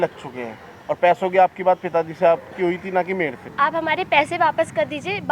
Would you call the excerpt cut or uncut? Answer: cut